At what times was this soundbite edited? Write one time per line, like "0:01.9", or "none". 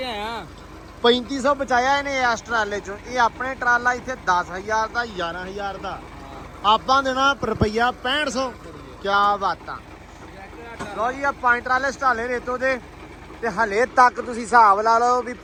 none